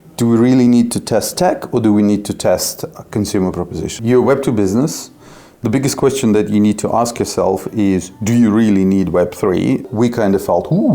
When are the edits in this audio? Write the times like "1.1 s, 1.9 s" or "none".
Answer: 3.9 s, 9.8 s